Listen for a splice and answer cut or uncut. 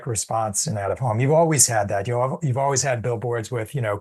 uncut